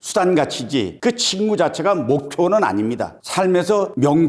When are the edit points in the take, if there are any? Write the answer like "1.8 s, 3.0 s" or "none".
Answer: none